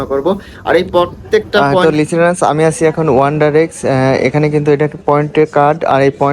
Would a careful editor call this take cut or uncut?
cut